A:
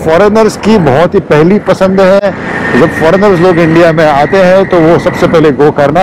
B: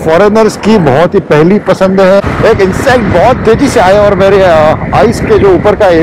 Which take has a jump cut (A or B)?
B